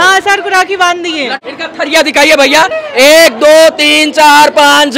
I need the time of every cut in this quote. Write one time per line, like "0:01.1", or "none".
0:01.4